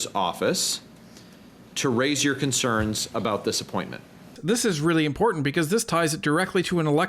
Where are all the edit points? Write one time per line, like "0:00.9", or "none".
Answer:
0:04.4